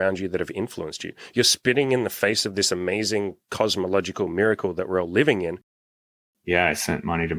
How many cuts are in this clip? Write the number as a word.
one